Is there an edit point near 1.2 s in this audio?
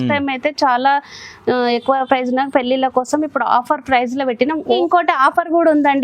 no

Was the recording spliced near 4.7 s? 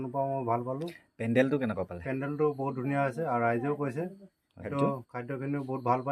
yes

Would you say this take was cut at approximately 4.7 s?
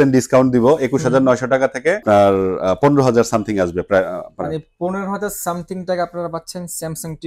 no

